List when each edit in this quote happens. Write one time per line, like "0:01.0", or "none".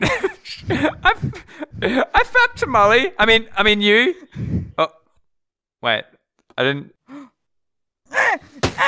none